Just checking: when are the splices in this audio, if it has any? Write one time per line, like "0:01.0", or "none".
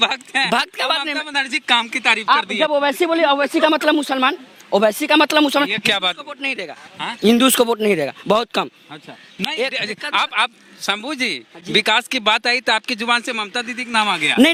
none